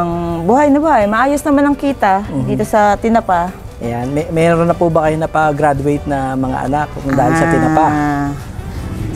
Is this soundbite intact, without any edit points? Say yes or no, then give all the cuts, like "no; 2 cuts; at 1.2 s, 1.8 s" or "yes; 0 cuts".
yes; 0 cuts